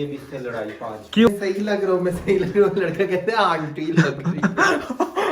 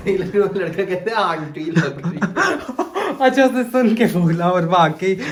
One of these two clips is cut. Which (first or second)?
first